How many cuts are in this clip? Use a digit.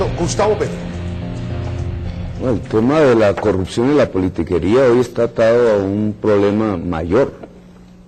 1